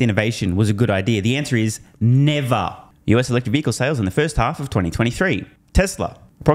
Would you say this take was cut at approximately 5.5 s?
no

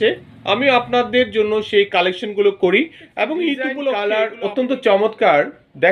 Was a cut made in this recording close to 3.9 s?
yes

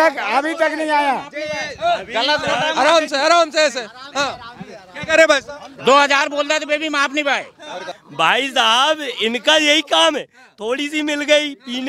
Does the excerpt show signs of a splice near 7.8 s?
yes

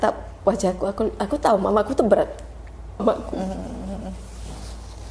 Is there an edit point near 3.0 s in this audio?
yes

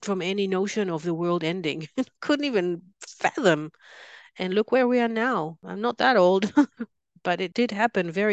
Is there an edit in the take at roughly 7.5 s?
yes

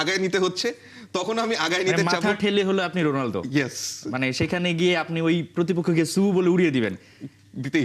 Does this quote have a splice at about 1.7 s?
no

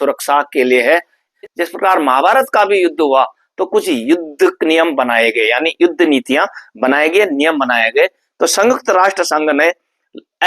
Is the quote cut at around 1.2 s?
yes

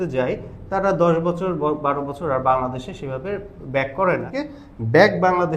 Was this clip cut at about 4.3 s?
yes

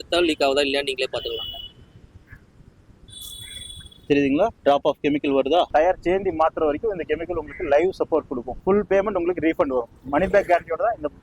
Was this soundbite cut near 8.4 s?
yes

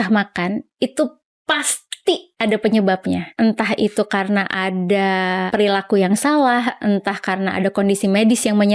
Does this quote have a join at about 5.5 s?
yes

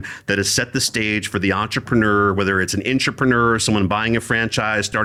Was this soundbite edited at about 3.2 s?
no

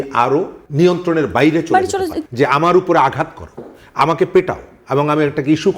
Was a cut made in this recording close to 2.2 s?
yes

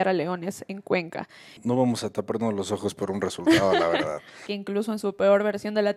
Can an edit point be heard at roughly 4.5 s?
yes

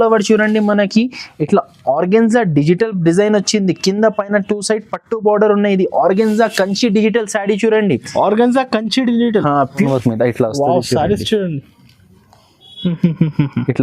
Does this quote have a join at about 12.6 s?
no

